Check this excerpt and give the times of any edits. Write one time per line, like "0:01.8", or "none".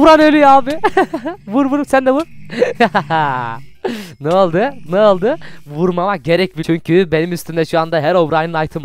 0:06.6